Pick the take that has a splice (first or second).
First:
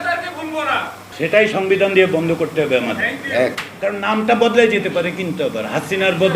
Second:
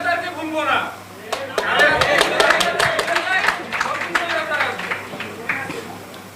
first